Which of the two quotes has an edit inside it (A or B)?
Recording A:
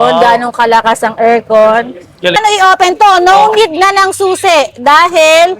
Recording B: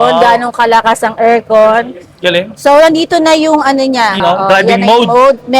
A